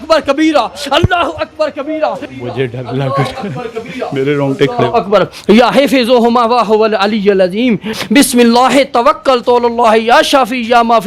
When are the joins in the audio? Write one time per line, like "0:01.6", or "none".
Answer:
0:02.3
0:08.0